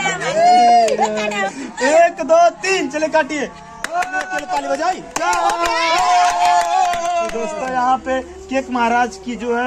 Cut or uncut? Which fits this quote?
cut